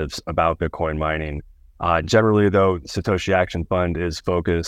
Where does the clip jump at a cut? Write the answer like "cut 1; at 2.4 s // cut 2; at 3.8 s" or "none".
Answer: none